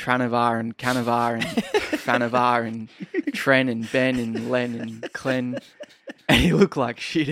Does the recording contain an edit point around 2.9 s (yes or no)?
no